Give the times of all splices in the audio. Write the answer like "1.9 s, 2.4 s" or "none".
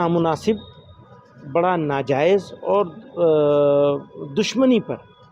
none